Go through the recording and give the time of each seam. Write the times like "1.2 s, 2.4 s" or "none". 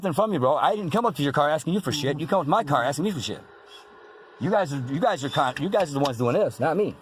none

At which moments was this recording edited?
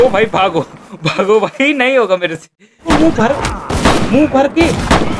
2.8 s

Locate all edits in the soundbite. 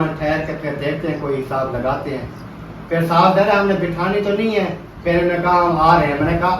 4.9 s

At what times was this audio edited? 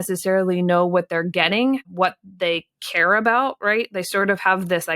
1.8 s

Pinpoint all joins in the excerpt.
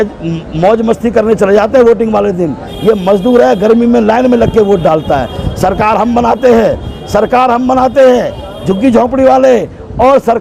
none

